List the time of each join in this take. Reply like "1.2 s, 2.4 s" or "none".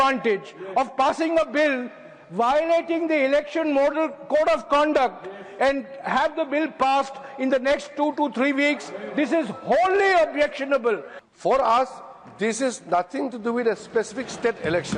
11.1 s